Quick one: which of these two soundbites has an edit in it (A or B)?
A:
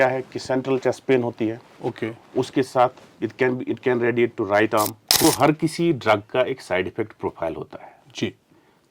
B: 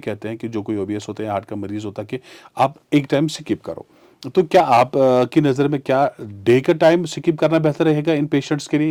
A